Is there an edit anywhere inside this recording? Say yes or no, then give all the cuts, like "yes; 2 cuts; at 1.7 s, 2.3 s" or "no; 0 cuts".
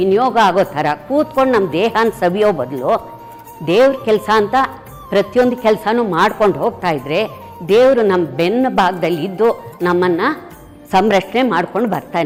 no; 0 cuts